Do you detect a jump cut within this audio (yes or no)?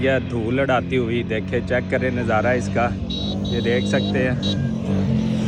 no